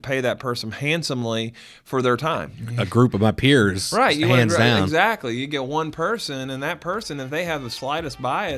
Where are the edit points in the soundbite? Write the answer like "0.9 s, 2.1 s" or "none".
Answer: 2.6 s

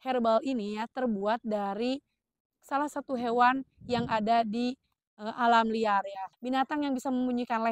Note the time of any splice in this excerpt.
6.3 s

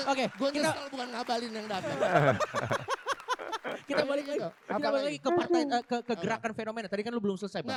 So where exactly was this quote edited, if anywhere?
none

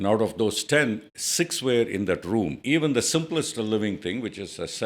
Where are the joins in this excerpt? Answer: 2.6 s

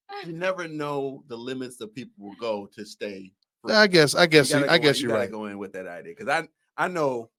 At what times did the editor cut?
none

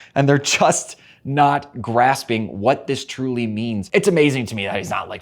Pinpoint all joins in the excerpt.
3.8 s

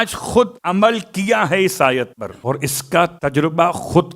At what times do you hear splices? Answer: 2.3 s

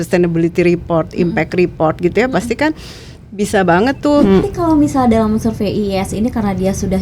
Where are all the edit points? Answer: 4.4 s

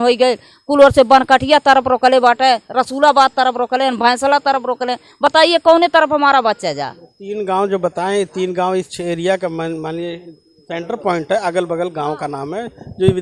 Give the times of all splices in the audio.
none

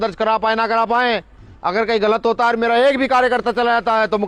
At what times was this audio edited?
none

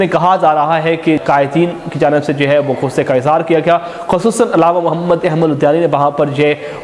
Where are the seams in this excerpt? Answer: 1.2 s

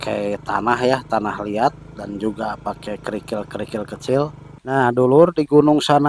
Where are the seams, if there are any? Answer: 4.5 s

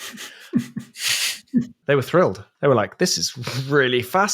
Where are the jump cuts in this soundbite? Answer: 1.8 s, 2.5 s

